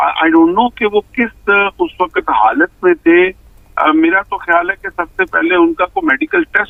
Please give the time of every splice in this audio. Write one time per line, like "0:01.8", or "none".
none